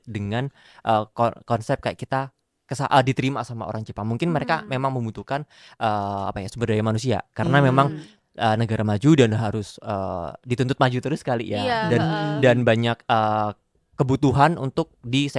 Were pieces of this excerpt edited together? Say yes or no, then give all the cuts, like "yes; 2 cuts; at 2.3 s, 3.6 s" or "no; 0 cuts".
no; 0 cuts